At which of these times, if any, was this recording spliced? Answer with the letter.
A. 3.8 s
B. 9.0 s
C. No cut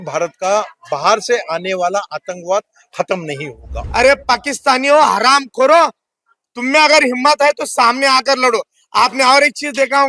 A